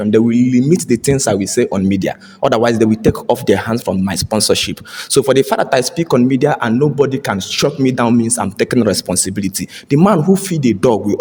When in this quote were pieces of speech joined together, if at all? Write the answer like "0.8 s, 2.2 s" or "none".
none